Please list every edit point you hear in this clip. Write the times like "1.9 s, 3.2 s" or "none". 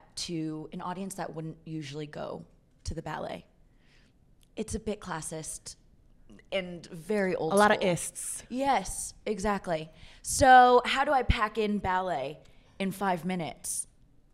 none